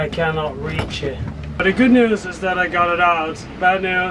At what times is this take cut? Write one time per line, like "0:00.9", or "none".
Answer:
none